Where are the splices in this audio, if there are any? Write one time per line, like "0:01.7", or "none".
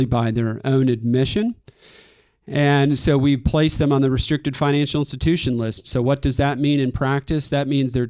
none